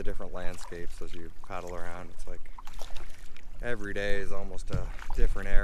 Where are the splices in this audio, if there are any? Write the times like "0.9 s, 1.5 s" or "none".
none